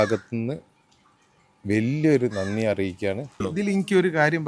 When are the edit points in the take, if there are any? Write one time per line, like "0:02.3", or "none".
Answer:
0:03.3